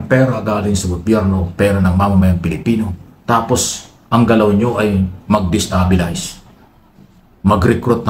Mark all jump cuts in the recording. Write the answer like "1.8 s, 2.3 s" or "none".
3.1 s